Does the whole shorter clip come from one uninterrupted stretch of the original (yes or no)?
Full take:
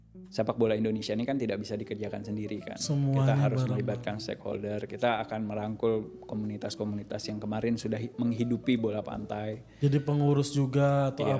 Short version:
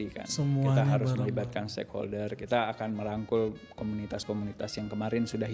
yes